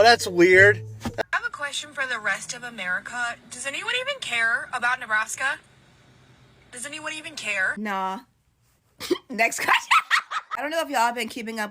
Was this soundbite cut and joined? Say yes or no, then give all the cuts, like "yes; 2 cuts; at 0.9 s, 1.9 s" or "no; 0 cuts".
yes; 1 cut; at 1.2 s